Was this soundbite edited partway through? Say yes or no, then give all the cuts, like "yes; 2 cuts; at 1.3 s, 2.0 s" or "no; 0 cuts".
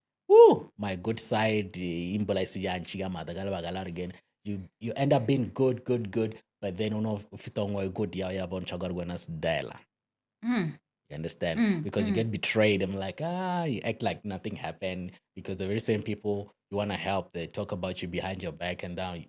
no; 0 cuts